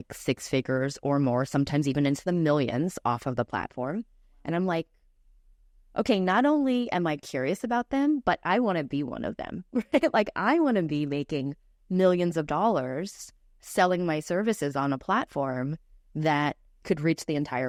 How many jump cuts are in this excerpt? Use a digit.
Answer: 0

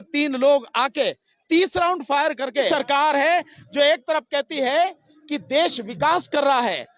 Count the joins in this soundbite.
1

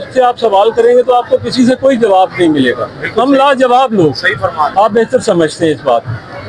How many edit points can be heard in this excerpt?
1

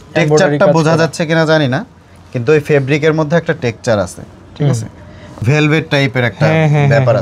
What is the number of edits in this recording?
1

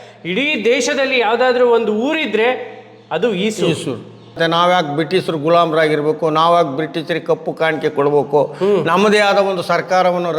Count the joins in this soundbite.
1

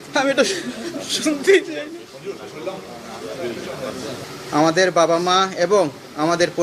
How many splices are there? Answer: 1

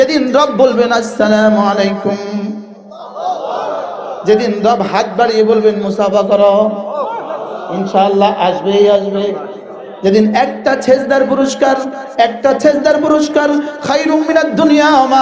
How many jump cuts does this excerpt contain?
0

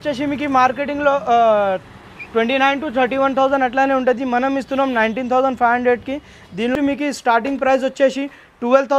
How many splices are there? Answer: 1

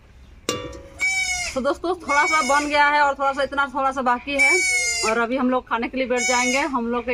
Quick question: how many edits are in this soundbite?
0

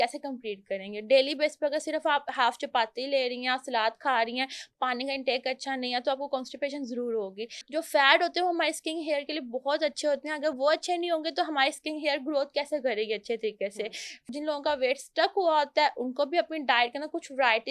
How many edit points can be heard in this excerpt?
2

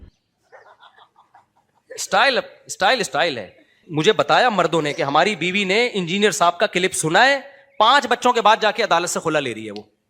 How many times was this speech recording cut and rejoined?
1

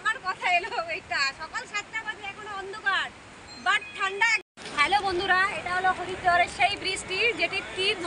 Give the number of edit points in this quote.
1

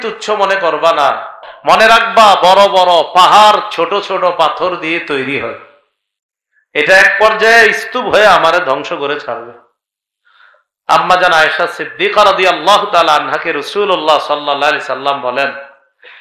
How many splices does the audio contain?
1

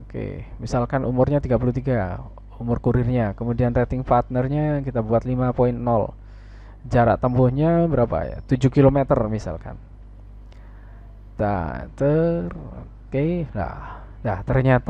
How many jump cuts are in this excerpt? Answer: 0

